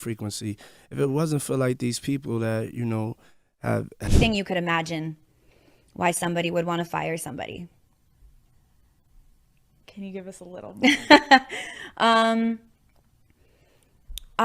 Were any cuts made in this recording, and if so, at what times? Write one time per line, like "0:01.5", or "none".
0:04.1